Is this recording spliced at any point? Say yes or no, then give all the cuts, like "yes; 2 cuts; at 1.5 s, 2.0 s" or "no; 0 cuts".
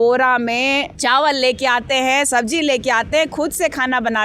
yes; 1 cut; at 0.9 s